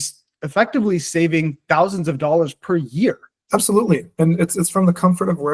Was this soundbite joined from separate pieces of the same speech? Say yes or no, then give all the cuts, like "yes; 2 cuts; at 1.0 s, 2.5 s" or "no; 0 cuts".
yes; 1 cut; at 3.3 s